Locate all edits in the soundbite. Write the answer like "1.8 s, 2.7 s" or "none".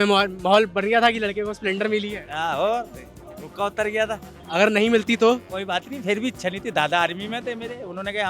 4.3 s

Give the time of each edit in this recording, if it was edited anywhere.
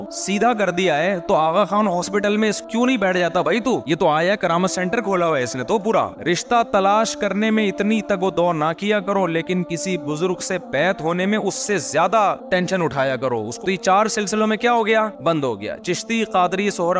3.8 s, 6.2 s, 13.6 s

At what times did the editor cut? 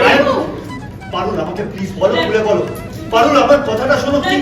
none

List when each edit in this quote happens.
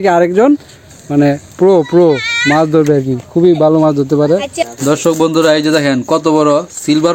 4.7 s

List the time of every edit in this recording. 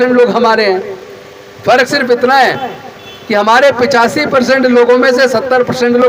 none

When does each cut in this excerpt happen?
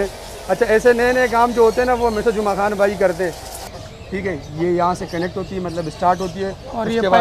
3.6 s

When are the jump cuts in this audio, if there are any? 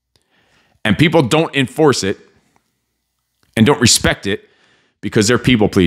none

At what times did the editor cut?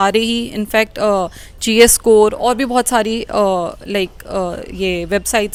none

